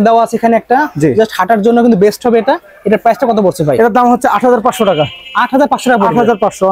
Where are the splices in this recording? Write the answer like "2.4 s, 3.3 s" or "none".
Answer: none